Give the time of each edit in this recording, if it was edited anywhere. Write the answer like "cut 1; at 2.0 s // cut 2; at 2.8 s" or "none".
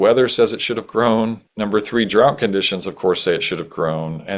cut 1; at 1.5 s